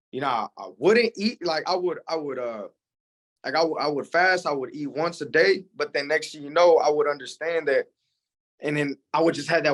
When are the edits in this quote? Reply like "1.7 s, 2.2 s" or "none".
none